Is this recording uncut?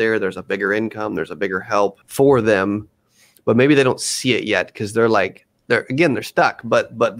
no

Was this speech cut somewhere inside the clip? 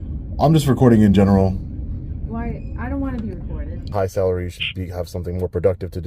yes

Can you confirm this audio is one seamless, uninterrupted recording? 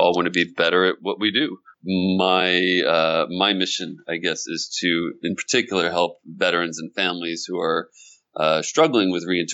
no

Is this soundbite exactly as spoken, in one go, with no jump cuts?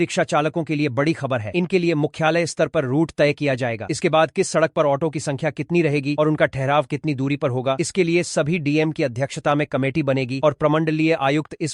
yes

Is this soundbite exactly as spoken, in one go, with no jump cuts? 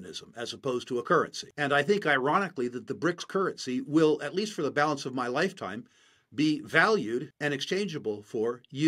no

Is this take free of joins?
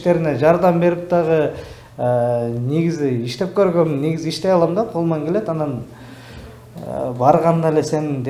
yes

